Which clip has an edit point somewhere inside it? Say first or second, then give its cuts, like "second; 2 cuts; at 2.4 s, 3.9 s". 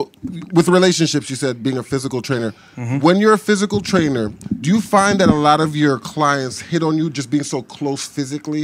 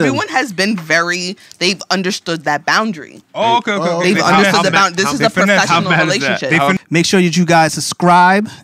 second; 1 cut; at 6.8 s